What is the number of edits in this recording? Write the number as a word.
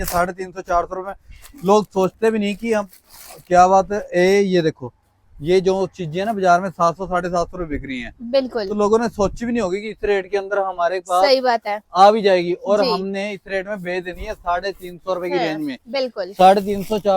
zero